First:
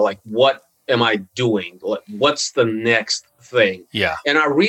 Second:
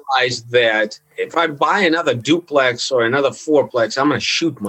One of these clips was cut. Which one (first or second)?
second